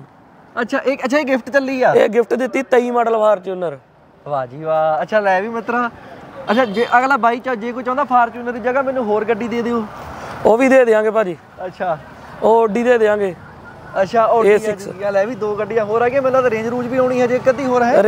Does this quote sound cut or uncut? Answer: uncut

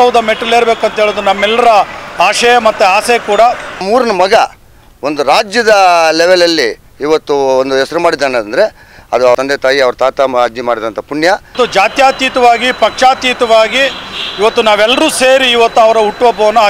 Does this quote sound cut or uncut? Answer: cut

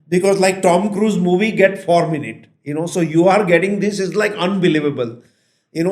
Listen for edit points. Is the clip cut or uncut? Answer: uncut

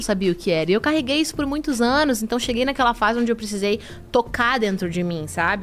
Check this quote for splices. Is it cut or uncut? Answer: uncut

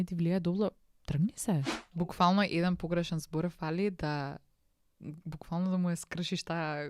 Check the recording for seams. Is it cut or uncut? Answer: cut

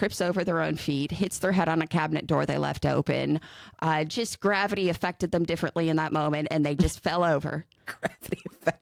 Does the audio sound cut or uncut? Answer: uncut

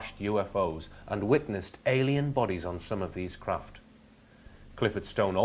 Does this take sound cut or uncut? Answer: uncut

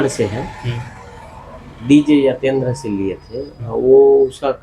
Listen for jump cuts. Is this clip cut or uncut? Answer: uncut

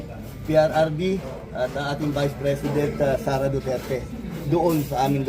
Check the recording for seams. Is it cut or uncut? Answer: uncut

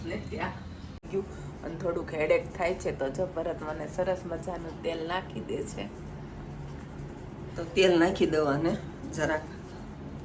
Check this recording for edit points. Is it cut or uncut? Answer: cut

